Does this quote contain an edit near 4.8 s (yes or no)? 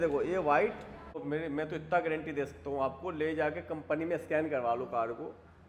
no